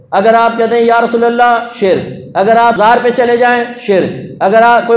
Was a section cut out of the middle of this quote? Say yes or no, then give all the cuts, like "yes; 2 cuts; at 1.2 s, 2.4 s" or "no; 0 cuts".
yes; 1 cut; at 2.8 s